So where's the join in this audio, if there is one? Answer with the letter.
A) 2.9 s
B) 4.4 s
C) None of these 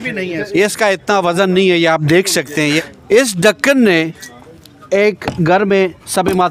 A